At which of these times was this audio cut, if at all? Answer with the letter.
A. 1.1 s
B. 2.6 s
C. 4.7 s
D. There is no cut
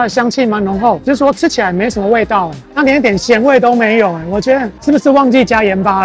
D